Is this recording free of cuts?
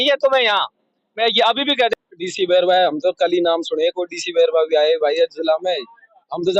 no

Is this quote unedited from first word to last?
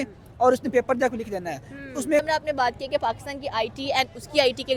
no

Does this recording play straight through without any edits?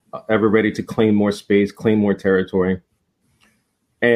yes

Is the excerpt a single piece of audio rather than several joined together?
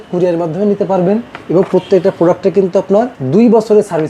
no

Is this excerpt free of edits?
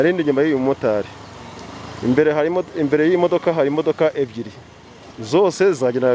yes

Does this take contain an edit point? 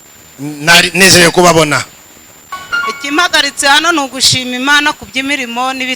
yes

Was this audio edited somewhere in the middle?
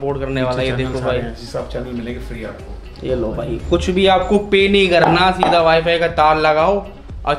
no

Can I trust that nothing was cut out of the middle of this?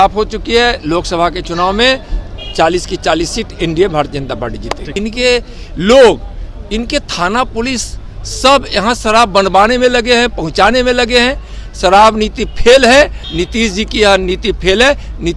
no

